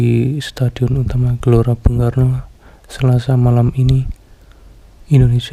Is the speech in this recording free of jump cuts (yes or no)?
yes